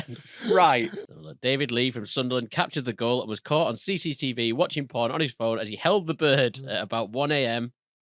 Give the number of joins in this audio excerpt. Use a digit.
1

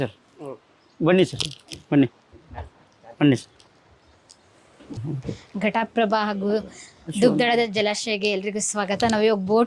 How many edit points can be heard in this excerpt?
1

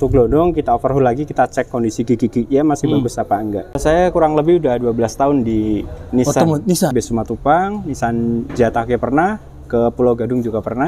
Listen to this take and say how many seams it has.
2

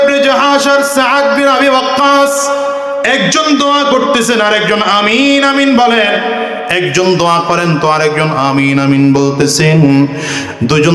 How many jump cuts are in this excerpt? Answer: 0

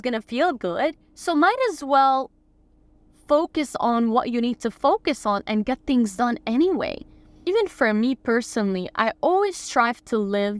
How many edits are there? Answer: 0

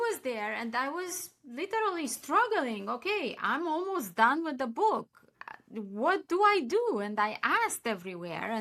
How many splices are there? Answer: 0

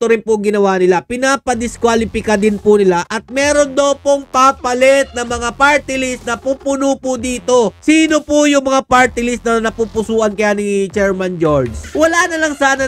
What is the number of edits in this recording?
1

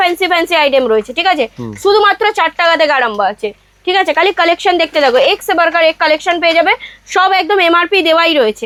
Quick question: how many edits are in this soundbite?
0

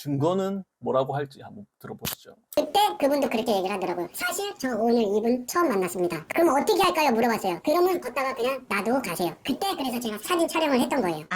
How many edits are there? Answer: 1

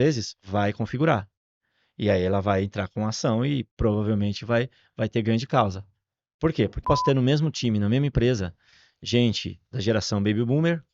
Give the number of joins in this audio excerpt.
1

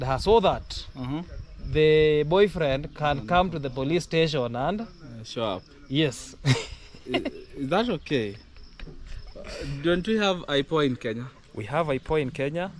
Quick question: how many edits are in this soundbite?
0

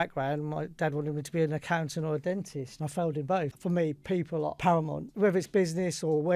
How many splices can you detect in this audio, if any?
2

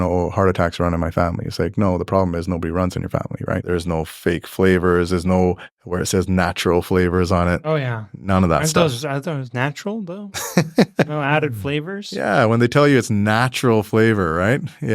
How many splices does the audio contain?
1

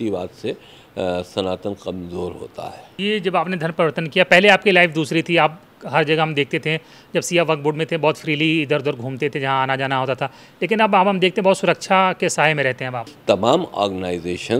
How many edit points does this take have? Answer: 2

